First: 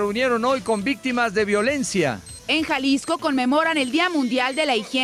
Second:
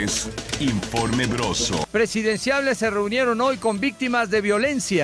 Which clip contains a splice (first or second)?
second